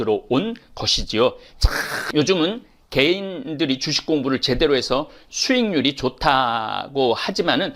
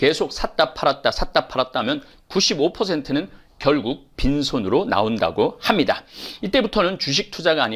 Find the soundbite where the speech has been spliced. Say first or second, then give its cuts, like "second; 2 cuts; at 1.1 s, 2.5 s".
first; 1 cut; at 2.0 s